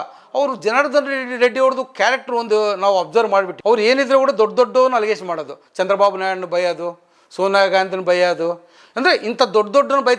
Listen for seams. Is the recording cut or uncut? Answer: uncut